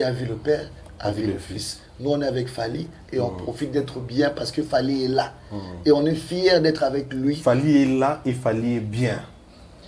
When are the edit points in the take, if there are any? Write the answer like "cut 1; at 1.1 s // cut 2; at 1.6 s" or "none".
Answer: none